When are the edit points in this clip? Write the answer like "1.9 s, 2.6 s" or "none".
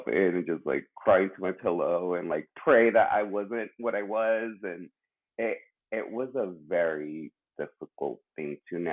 none